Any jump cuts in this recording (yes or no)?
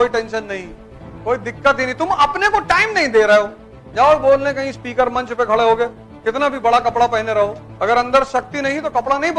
yes